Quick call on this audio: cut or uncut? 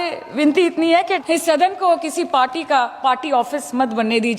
cut